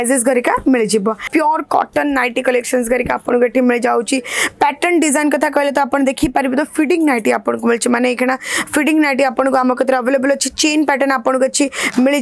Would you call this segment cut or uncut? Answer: cut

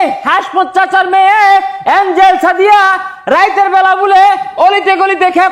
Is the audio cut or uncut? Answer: uncut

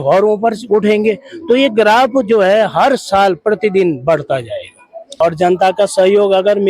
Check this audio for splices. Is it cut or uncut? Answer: cut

